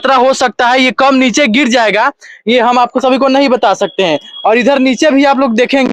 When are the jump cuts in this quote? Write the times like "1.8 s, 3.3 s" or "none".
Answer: none